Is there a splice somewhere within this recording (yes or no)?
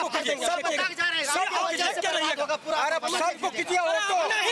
no